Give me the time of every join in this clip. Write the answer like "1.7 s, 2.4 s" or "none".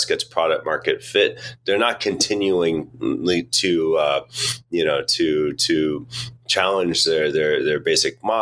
none